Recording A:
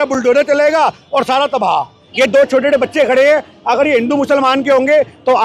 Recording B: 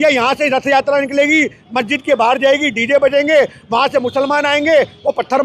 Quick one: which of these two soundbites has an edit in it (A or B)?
A